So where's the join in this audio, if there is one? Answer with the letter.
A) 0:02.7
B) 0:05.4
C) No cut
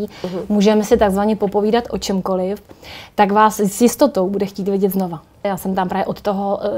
B